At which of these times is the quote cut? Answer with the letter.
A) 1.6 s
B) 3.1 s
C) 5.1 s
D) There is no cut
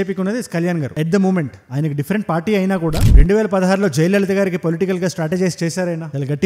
B